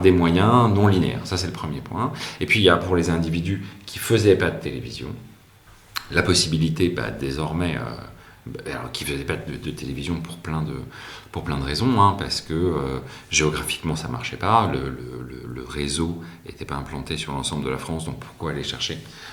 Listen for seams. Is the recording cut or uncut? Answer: uncut